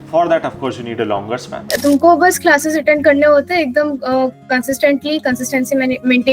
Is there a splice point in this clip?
yes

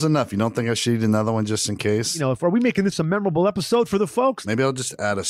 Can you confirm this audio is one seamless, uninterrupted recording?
no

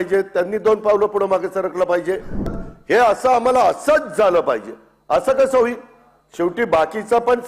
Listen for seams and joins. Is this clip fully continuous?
no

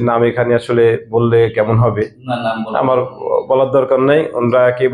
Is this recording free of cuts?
yes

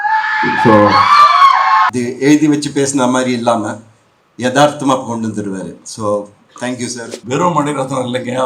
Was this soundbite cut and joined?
yes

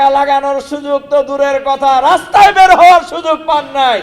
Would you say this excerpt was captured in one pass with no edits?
yes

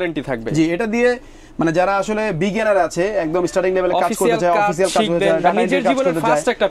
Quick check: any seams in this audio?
no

